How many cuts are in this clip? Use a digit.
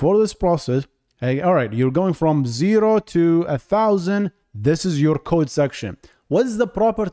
0